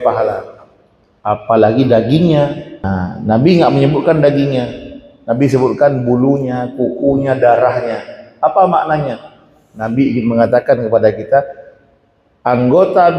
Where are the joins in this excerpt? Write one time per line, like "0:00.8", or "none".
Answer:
0:02.8